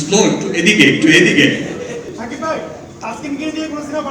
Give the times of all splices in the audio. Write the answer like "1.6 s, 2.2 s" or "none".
2.1 s